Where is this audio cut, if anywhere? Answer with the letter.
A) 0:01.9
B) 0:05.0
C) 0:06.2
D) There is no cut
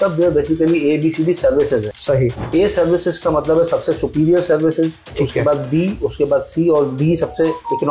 A